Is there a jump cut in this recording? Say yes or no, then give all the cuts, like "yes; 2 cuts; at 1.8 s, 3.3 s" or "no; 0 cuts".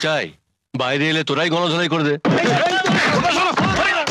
yes; 1 cut; at 2.2 s